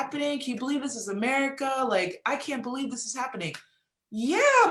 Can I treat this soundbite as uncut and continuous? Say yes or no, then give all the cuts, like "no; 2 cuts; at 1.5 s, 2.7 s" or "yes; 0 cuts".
yes; 0 cuts